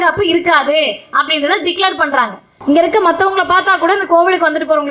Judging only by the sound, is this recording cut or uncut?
cut